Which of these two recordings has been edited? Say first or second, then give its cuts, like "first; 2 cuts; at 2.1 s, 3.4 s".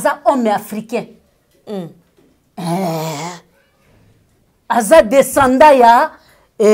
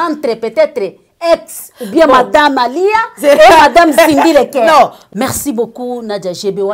second; 1 cut; at 5.0 s